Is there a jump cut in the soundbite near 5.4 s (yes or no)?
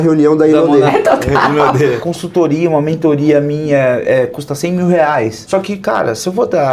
yes